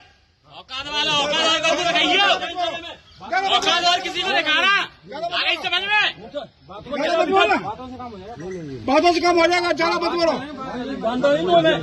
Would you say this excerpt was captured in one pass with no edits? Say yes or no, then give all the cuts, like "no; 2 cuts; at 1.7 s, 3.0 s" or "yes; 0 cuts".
yes; 0 cuts